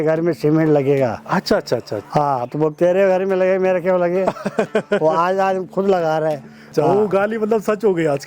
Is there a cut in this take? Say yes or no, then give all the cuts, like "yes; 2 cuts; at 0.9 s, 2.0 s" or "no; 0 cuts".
yes; 2 cuts; at 2.0 s, 6.7 s